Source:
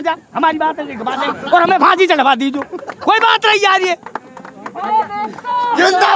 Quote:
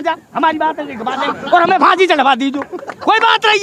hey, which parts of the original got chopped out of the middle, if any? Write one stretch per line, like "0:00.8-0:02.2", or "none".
none